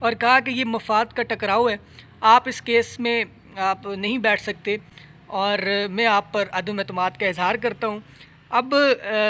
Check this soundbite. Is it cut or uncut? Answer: uncut